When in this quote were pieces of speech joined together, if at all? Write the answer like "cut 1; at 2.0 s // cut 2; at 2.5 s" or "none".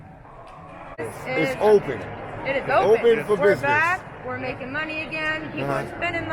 cut 1; at 1.1 s